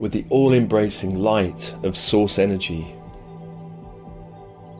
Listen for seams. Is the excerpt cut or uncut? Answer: cut